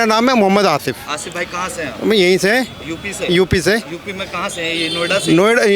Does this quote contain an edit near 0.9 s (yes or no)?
no